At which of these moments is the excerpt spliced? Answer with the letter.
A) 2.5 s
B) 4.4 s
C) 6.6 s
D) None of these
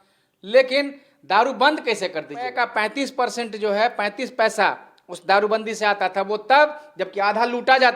A